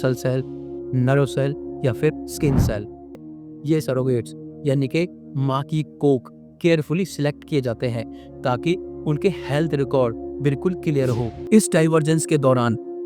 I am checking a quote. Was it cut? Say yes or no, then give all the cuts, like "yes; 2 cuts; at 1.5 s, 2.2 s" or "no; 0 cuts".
yes; 2 cuts; at 3.2 s, 11.4 s